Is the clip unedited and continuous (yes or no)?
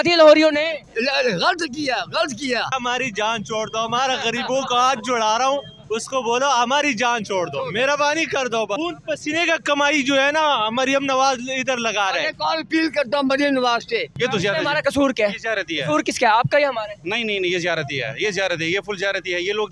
no